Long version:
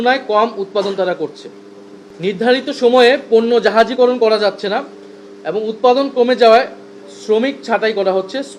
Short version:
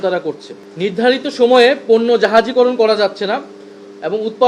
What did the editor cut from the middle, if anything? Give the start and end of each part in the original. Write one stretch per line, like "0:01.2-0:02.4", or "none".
0:01.9-0:02.3